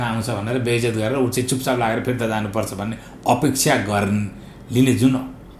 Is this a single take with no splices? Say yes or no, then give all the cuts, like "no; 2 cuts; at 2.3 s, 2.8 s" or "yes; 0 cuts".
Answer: yes; 0 cuts